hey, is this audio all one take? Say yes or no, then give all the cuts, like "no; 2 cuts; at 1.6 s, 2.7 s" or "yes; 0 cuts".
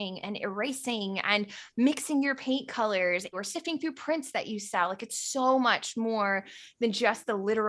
no; 1 cut; at 3.3 s